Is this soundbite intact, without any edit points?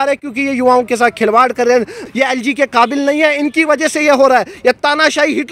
no; 1 cut; at 2.0 s

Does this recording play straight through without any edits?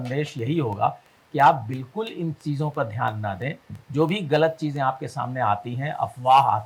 yes; 0 cuts

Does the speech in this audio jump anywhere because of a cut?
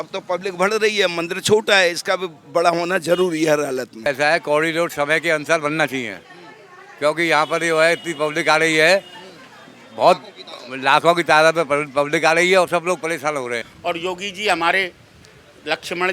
yes; 2 cuts; at 4.1 s, 13.7 s

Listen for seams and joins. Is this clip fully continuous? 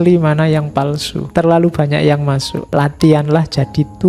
no; 2 cuts; at 1.2 s, 2.5 s

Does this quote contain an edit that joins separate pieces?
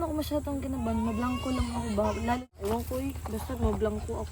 yes; 1 cut; at 2.4 s

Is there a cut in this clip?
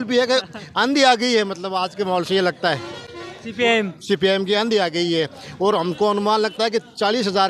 no; 0 cuts

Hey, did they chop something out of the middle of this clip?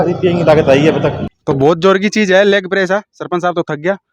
yes; 1 cut; at 1.3 s

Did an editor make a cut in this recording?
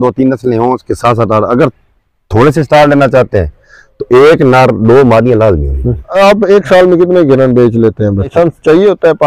yes; 2 cuts; at 6.1 s, 8.3 s

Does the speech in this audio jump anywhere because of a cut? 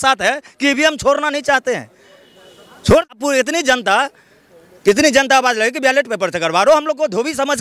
yes; 1 cut; at 3.2 s

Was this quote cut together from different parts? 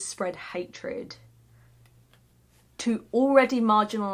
no; 0 cuts

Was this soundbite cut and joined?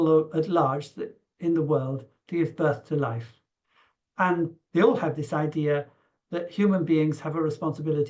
no; 0 cuts

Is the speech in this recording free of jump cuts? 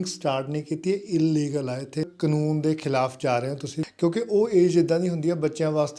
no; 2 cuts; at 2.1 s, 3.8 s

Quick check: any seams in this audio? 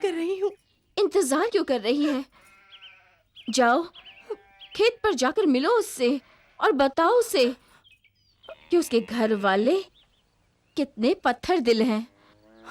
no; 0 cuts

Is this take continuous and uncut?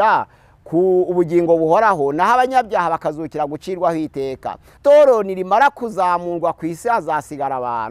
no; 1 cut; at 4.7 s

